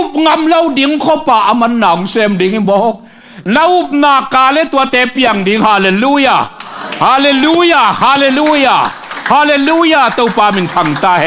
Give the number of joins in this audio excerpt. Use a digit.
0